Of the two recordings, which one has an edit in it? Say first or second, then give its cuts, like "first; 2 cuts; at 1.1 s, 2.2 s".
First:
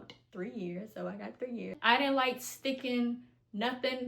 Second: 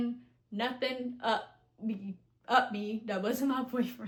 first; 1 cut; at 1.7 s